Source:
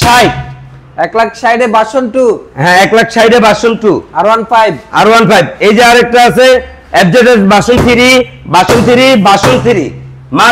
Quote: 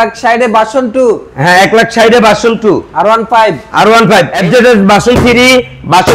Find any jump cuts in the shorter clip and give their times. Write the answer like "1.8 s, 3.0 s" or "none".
4.3 s

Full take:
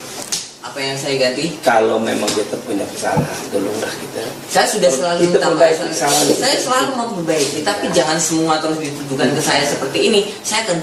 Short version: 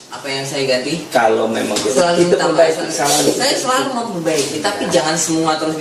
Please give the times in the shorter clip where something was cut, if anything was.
1.9 s

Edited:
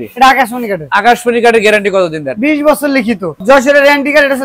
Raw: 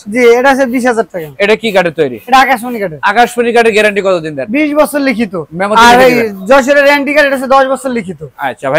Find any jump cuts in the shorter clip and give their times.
3.3 s

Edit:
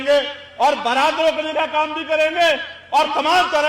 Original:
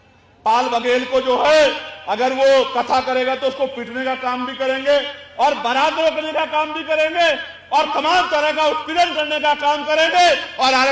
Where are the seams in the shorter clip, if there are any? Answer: none

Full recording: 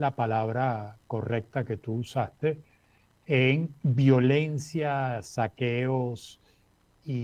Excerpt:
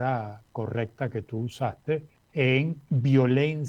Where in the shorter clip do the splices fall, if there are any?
2.2 s

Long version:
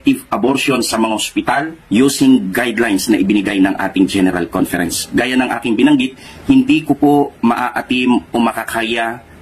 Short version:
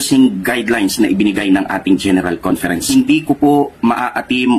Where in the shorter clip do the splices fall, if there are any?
2.8 s

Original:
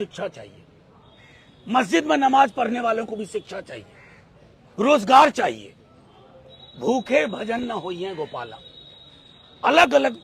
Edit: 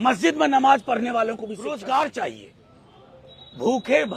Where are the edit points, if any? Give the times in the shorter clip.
1.6 s

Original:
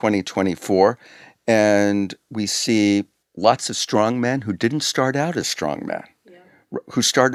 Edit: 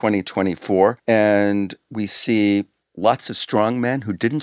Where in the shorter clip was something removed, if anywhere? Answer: 1.0 s

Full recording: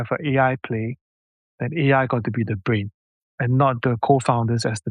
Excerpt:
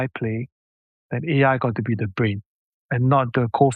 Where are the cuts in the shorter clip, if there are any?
none

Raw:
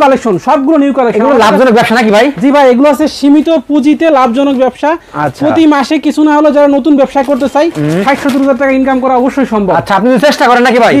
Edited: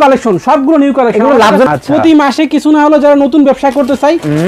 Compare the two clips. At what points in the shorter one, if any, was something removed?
1.7 s

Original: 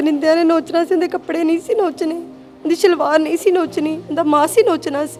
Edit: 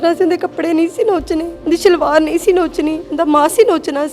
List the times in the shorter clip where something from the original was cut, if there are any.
1.5 s

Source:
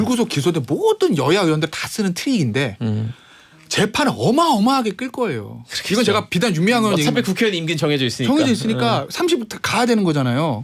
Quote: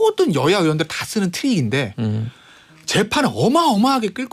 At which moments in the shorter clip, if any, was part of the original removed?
none

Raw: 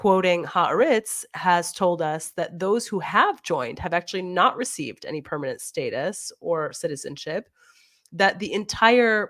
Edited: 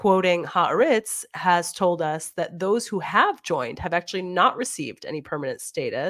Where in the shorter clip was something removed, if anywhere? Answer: none

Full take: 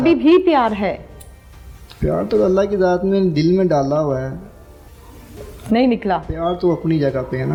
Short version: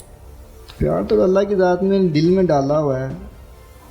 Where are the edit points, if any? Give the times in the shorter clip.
none

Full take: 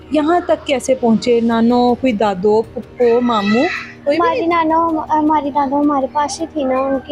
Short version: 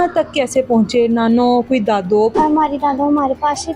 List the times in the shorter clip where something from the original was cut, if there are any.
2.3 s

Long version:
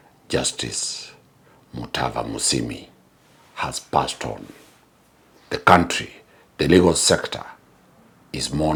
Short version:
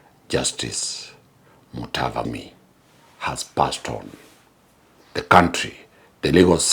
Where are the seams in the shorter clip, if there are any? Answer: 2.2 s

